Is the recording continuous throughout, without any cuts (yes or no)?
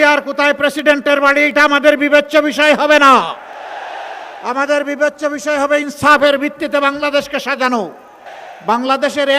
no